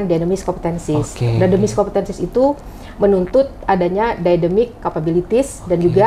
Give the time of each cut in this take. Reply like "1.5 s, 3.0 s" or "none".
none